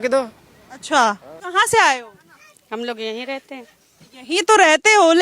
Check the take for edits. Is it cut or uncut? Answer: cut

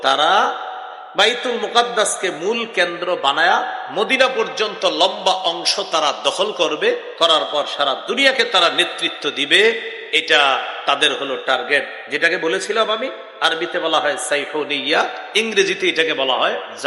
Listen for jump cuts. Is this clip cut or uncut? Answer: uncut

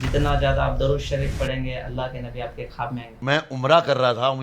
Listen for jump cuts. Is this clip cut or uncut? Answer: cut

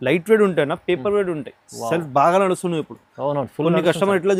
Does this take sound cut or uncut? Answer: uncut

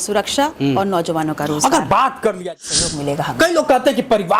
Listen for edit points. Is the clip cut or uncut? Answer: cut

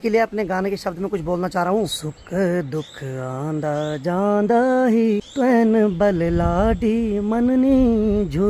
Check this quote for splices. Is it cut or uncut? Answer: cut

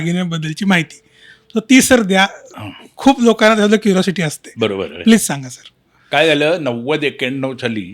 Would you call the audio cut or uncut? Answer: uncut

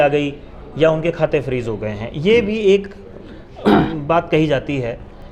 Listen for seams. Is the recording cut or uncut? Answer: uncut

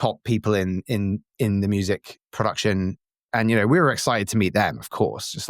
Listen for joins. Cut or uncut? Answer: cut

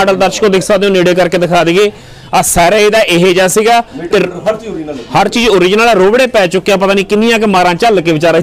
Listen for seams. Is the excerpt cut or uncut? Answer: uncut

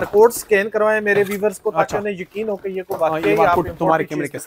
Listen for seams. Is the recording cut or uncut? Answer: uncut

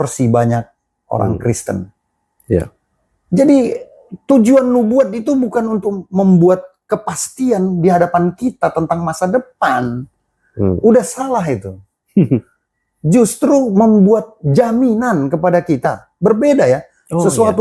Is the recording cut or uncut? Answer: uncut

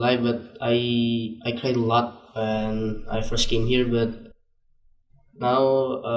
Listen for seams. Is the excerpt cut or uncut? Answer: uncut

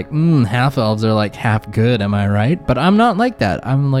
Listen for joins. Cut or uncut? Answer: uncut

